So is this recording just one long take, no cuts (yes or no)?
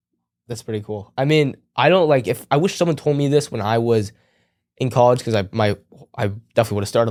yes